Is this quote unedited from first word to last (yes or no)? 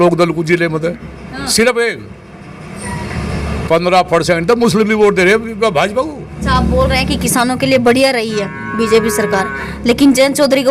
no